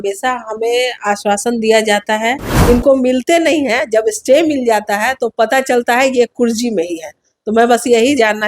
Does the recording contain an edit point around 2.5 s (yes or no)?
yes